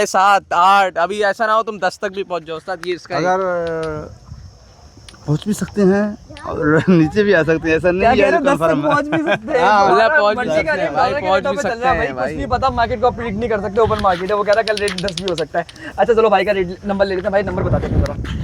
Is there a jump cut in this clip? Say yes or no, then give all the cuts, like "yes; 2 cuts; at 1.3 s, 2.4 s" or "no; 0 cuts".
no; 0 cuts